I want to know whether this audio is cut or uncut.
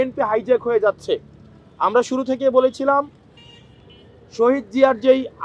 uncut